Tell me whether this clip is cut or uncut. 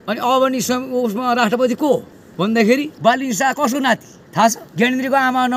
cut